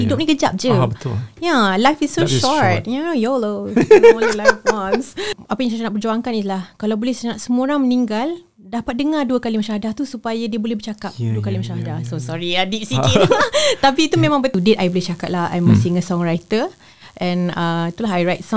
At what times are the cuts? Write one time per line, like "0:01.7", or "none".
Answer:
0:05.3
0:14.5